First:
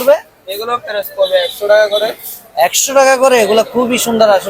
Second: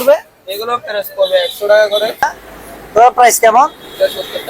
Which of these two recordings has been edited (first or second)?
second